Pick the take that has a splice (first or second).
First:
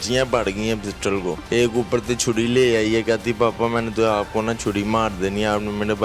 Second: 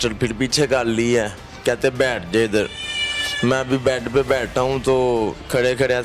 first